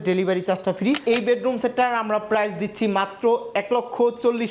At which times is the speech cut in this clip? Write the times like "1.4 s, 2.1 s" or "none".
1.0 s